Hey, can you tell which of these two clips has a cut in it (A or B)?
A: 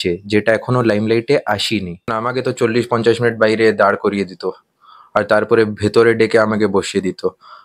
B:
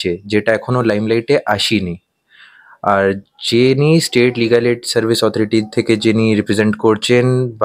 A